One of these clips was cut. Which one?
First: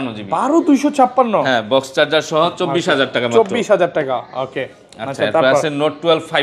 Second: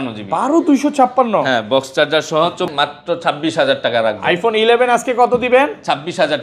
second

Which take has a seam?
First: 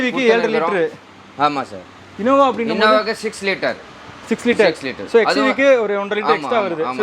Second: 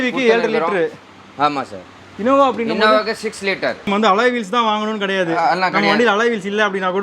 second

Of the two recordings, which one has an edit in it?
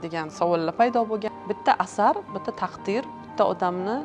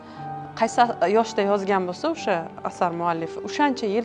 first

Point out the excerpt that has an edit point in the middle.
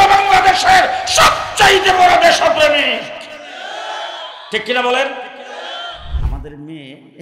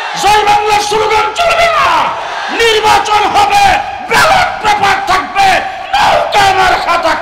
first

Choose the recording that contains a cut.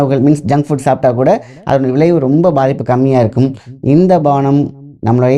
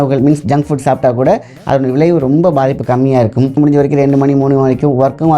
second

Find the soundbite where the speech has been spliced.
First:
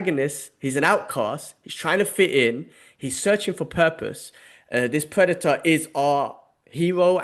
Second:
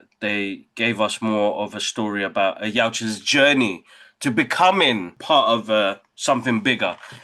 second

